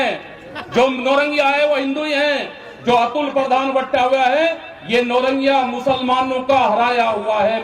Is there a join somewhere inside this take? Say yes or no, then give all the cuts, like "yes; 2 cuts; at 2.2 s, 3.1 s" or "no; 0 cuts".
no; 0 cuts